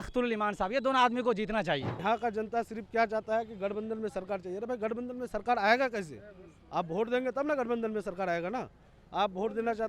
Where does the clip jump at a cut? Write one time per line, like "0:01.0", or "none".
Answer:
0:02.0